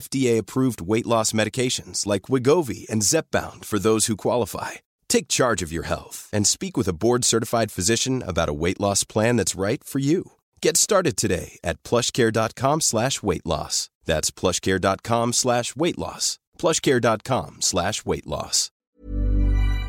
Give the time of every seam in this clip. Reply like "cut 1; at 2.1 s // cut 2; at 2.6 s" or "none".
cut 1; at 18.9 s